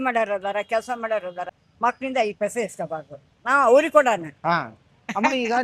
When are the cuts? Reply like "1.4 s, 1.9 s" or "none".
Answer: 1.5 s